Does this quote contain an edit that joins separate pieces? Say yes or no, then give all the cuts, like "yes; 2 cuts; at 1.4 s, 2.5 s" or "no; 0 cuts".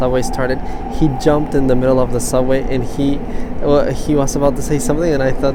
no; 0 cuts